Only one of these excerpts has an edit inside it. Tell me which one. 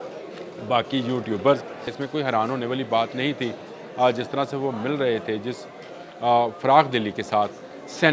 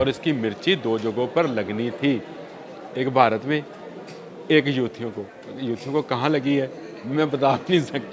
first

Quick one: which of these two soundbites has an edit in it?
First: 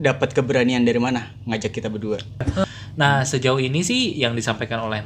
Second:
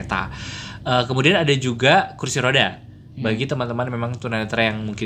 first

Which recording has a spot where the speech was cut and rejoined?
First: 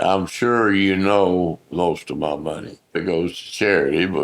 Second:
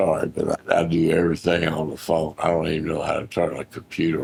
first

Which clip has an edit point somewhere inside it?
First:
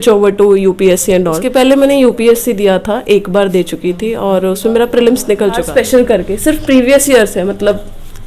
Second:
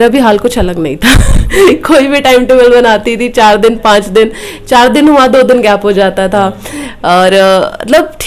first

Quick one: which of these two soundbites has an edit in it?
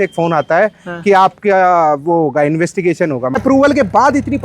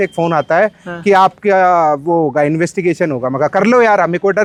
first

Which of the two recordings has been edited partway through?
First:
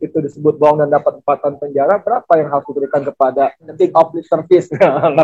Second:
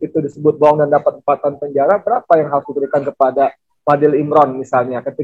first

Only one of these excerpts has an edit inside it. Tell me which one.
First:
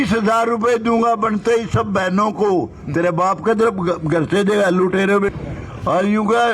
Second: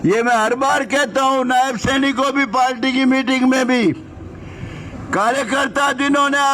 first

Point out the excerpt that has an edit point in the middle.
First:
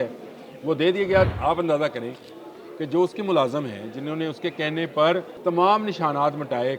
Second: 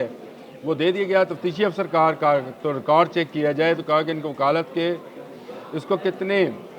first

